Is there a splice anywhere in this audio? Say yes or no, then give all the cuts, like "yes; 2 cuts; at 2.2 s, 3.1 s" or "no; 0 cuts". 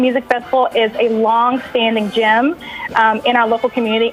no; 0 cuts